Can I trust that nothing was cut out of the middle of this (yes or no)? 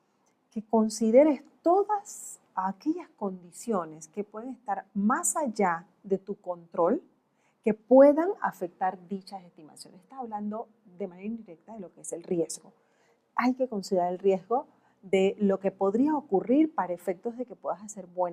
yes